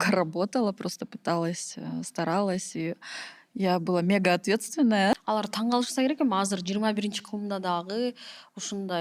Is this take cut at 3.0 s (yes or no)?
no